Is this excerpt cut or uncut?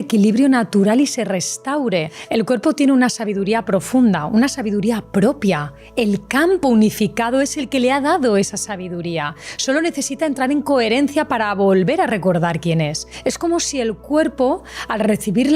cut